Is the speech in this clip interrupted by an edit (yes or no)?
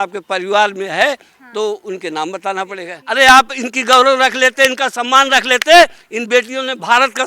yes